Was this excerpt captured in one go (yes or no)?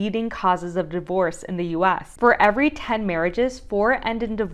yes